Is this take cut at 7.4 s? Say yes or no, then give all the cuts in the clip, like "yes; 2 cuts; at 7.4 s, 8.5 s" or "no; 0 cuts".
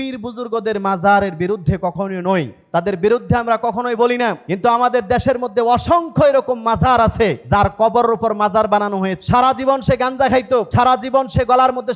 yes; 5 cuts; at 2.6 s, 4.5 s, 7.4 s, 9.2 s, 10.7 s